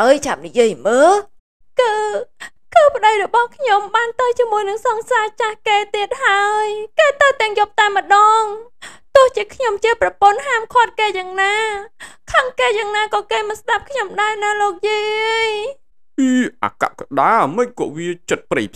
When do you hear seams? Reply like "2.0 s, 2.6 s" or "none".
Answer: none